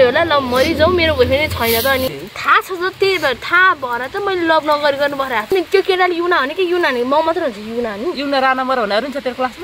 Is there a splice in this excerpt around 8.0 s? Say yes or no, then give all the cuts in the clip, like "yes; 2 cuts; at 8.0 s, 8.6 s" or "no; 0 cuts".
no; 2 cuts; at 2.1 s, 5.5 s